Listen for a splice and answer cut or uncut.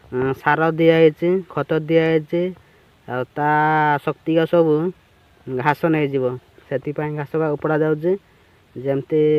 uncut